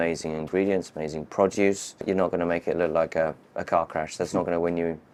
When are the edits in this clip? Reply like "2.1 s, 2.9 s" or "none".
none